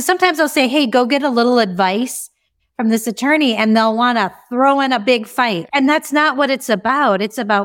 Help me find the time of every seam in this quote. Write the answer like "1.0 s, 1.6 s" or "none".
5.6 s